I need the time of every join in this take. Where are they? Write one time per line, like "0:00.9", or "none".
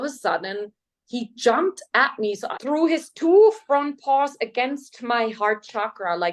0:02.5